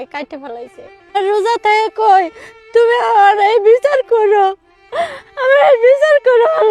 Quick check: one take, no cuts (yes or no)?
no